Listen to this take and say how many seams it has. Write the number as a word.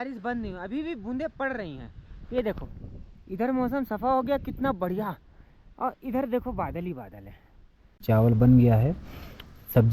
one